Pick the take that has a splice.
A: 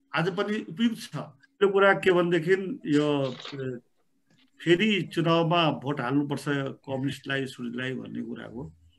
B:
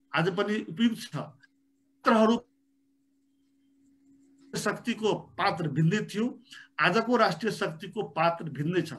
A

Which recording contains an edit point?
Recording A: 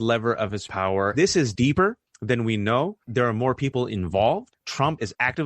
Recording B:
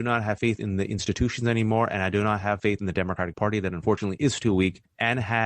A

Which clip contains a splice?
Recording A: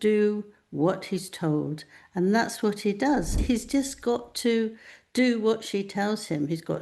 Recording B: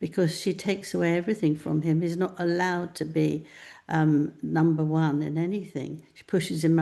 A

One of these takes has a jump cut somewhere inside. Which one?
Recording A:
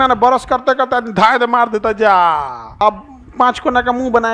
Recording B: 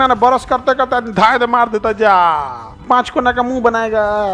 B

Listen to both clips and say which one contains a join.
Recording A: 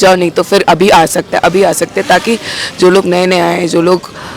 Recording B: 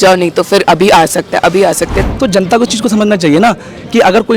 B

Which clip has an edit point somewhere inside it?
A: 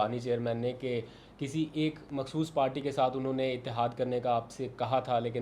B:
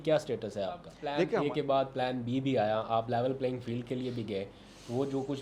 B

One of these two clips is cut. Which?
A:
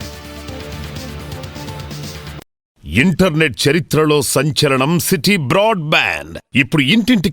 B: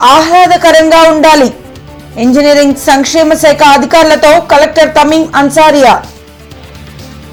A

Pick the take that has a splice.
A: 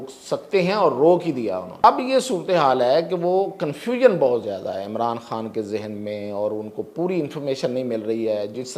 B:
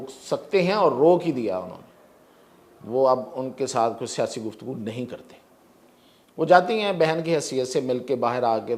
A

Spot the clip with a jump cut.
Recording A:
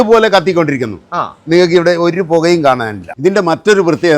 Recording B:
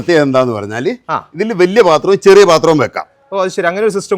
A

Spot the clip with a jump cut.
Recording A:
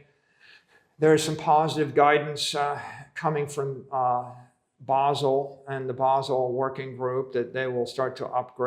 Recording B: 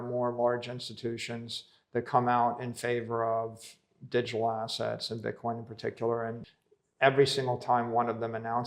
B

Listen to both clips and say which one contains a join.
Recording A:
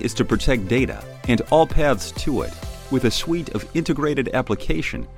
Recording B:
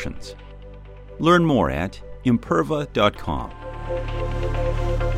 B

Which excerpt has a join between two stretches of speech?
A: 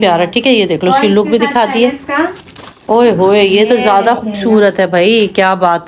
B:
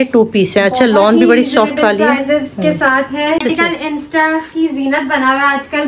B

